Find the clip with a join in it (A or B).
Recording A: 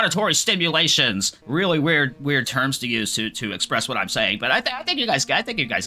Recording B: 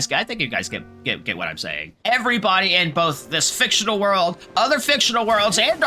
B